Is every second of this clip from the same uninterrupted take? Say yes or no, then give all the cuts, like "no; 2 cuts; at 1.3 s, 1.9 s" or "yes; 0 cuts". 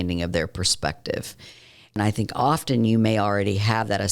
no; 1 cut; at 2.0 s